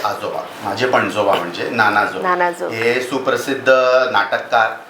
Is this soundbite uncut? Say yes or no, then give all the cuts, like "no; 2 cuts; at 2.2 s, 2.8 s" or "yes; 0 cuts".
yes; 0 cuts